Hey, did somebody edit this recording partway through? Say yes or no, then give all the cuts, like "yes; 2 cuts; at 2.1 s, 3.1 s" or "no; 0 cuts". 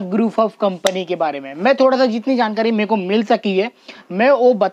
no; 0 cuts